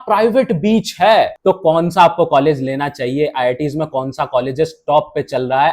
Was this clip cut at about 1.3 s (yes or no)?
yes